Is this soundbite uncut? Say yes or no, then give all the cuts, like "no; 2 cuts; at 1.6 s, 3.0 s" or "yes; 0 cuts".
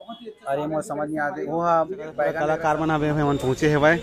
no; 1 cut; at 2.4 s